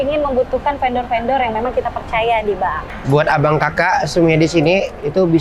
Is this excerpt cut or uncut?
cut